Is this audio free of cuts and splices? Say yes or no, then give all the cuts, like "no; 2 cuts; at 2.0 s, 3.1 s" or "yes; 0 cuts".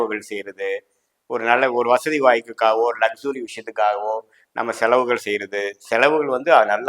yes; 0 cuts